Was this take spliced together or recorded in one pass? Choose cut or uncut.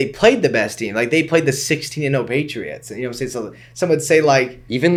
uncut